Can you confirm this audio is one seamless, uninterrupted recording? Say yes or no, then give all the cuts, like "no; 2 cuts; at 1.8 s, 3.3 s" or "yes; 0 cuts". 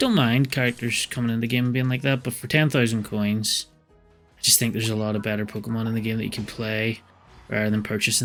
yes; 0 cuts